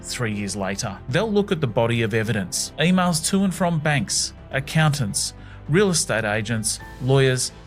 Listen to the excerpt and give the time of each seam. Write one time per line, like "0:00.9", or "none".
none